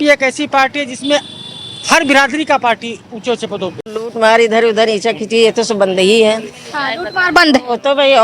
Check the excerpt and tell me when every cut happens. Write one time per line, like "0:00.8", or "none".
0:04.1